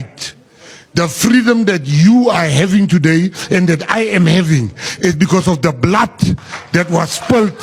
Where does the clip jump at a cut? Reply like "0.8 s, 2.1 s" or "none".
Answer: none